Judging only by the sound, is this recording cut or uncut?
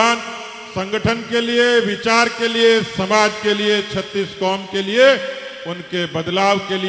uncut